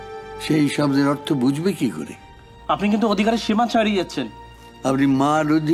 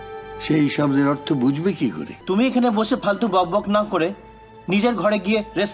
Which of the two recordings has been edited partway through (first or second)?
second